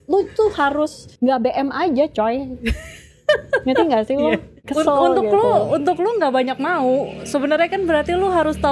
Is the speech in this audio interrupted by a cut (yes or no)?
yes